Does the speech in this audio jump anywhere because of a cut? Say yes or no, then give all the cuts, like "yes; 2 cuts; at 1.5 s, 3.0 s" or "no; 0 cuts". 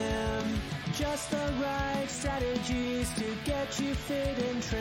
no; 0 cuts